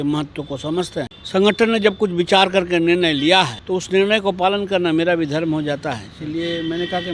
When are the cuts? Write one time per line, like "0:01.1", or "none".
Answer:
0:01.2
0:03.6

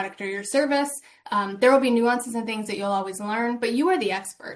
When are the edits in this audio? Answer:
none

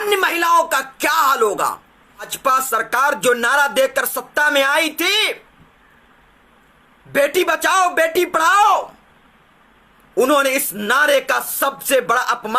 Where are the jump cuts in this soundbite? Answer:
0:02.3

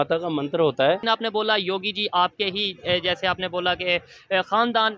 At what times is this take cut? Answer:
0:01.0

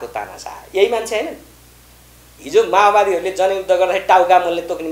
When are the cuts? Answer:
none

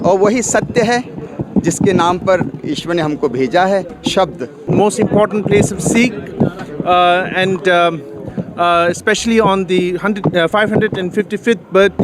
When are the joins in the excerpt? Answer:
0:04.6

